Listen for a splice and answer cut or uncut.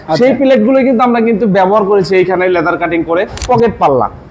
cut